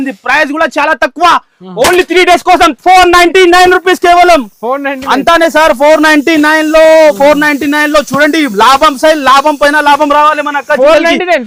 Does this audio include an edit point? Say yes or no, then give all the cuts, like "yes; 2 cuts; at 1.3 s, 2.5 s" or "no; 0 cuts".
no; 0 cuts